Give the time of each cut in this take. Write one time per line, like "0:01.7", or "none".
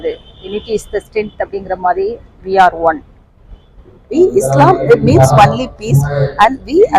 0:04.0